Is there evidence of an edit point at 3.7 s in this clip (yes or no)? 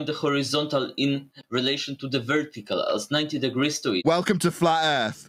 no